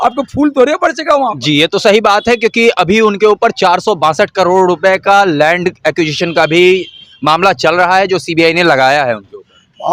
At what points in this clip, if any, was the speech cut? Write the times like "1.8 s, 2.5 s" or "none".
none